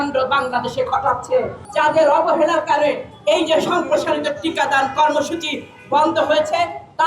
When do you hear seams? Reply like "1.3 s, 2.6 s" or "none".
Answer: 1.6 s